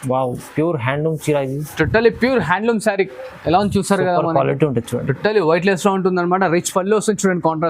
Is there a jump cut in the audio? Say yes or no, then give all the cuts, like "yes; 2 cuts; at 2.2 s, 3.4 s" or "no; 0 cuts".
no; 0 cuts